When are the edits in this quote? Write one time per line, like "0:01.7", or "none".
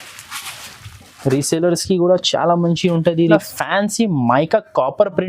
0:03.4